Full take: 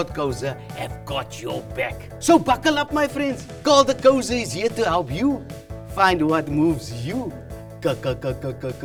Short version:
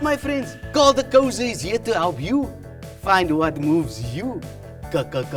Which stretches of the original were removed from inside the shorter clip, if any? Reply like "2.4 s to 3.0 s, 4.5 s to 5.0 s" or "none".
none